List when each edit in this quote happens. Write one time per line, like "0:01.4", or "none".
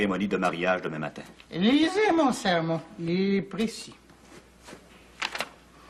none